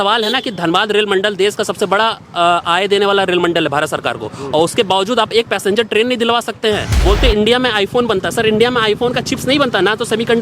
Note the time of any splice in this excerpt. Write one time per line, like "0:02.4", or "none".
0:06.9